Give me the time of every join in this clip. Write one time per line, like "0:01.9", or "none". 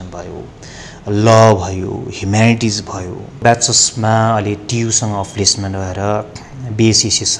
0:03.4